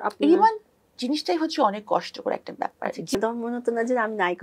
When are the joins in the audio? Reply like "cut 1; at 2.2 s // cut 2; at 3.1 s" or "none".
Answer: cut 1; at 3.1 s